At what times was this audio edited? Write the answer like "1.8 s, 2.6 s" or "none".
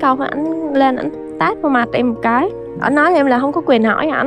none